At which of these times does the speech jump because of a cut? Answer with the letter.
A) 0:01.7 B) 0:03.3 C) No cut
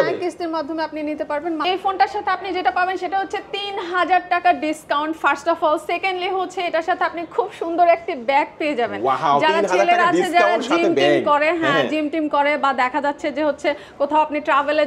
A